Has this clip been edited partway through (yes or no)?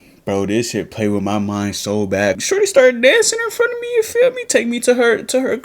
yes